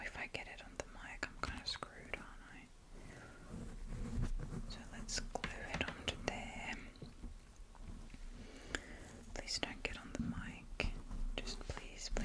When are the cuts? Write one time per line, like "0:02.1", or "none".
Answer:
none